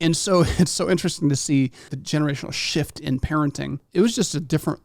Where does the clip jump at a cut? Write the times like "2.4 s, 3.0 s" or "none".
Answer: 1.9 s, 3.8 s